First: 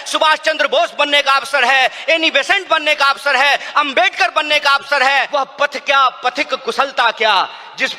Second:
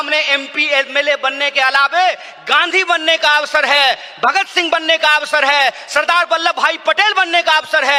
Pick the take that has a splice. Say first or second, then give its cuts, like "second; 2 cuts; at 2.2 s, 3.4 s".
first; 1 cut; at 5.3 s